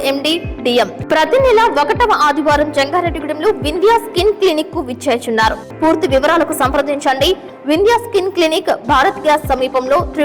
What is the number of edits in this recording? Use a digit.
2